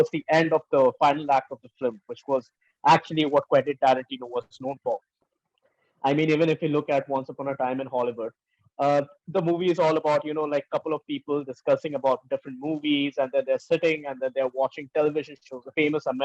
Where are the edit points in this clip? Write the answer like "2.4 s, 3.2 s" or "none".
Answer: 5.2 s

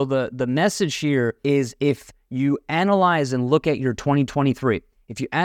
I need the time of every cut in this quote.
1.4 s

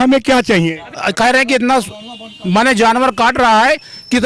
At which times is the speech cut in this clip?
1.0 s

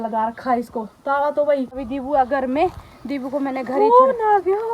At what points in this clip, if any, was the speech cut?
1.8 s

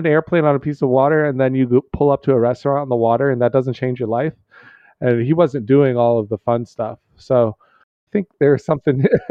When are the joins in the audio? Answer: 7.9 s

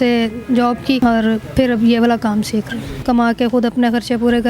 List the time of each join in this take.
3.0 s

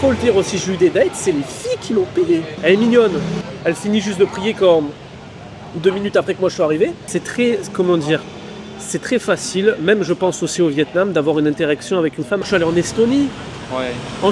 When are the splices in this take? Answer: 2.5 s, 3.5 s, 7.0 s, 12.4 s

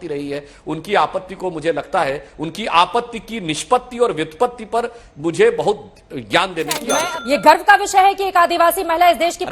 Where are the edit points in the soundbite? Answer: 7.0 s

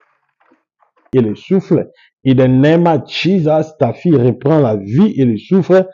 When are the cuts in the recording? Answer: 1.1 s

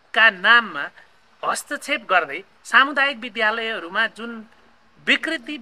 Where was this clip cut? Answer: none

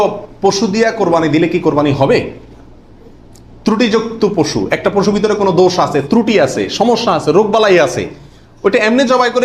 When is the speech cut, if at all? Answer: none

